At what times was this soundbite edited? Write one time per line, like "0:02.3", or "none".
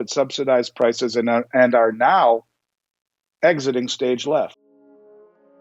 0:04.7